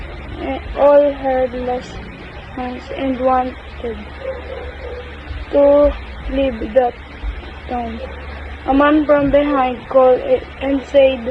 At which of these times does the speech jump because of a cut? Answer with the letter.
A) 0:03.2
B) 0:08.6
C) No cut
A